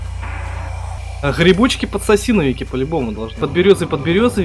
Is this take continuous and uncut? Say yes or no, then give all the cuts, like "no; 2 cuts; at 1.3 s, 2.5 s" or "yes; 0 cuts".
no; 2 cuts; at 1.0 s, 3.4 s